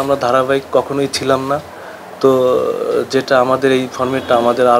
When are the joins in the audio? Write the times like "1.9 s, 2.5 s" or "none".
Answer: none